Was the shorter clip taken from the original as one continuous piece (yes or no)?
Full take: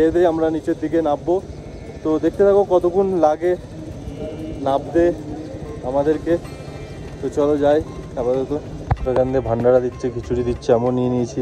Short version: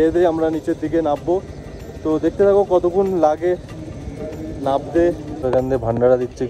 no